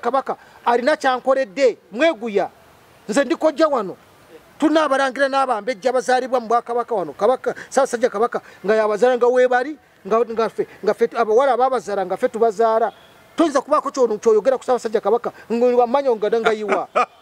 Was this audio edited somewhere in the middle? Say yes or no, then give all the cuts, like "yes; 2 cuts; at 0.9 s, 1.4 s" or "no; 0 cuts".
no; 0 cuts